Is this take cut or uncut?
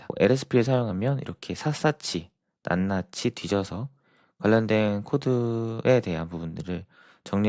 uncut